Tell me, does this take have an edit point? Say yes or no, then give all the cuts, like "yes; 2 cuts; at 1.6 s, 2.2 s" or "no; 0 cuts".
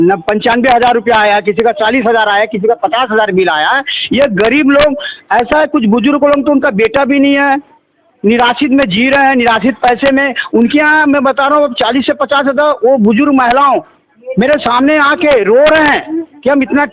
no; 0 cuts